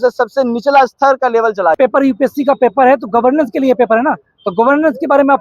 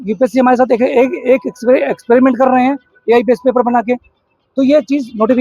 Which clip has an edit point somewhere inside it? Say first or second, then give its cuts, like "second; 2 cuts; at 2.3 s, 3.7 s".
first; 1 cut; at 1.8 s